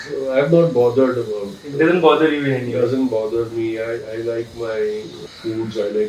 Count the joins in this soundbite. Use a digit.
0